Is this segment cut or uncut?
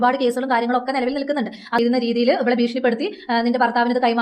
cut